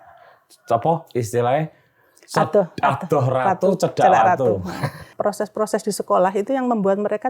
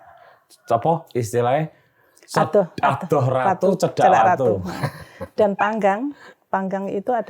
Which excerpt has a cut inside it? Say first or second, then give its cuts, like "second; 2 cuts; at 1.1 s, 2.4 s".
first; 1 cut; at 5.1 s